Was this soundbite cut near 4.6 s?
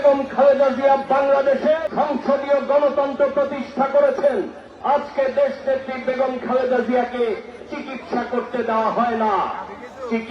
yes; 2 cuts; at 1.9 s, 4.6 s

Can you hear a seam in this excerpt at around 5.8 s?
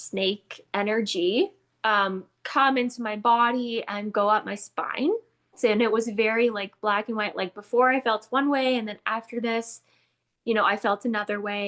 yes; 1 cut; at 5.8 s

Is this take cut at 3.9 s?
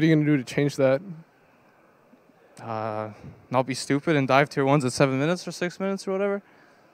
no; 0 cuts

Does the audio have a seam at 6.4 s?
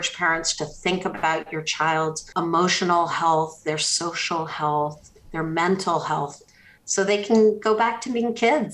yes; 2 cuts; at 2.2 s, 6.4 s

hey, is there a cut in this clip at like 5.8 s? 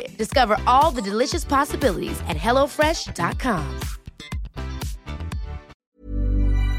yes; 1 cut; at 5.8 s

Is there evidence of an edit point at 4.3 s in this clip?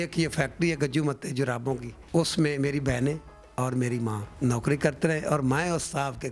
yes; 2 cuts; at 1.9 s, 4.3 s

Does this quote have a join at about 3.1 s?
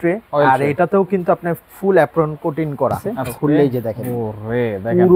yes; 1 cut; at 3.1 s

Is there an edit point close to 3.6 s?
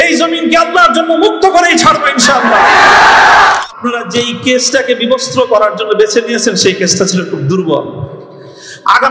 yes; 1 cut; at 3.6 s

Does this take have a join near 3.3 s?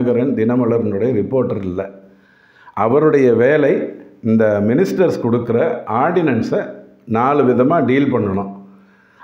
no; 0 cuts

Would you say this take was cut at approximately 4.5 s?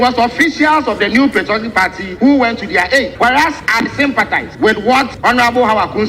yes; 4 cuts; at 2.0 s, 3.4 s, 4.5 s, 5.1 s

